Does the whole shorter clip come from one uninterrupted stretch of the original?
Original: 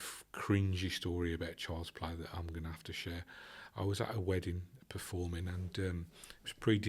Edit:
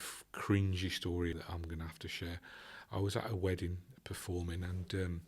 no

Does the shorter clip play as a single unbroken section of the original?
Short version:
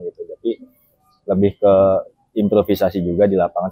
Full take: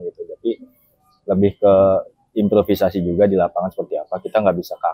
yes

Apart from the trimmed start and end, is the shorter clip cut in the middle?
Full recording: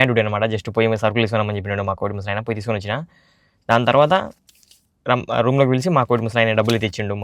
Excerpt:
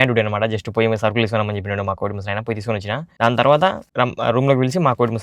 yes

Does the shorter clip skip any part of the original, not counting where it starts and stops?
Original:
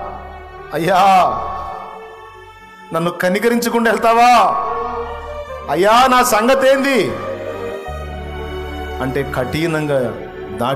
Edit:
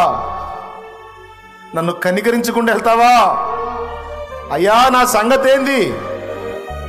no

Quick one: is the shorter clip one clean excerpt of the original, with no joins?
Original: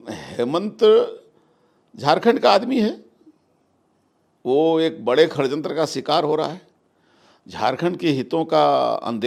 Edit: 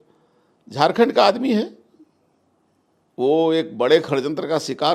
yes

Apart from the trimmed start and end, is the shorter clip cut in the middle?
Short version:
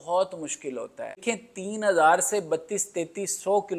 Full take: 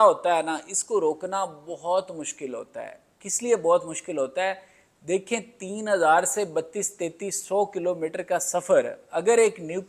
yes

